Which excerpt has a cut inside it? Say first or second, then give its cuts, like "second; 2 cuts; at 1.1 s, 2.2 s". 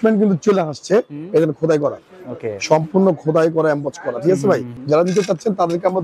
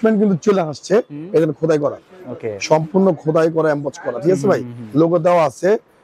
first; 1 cut; at 4.7 s